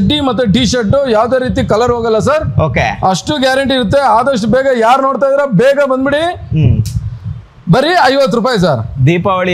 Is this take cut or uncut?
uncut